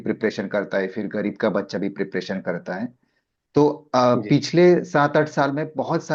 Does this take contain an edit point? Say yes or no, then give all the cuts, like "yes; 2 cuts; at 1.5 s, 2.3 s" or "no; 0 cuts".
no; 0 cuts